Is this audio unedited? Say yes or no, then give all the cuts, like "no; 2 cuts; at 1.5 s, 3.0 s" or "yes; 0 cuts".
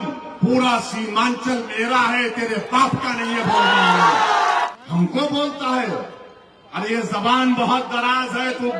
no; 1 cut; at 4.7 s